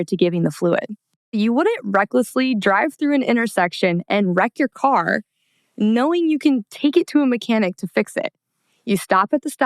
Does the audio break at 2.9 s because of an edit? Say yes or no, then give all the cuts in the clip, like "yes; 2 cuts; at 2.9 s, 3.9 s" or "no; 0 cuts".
no; 1 cut; at 1.3 s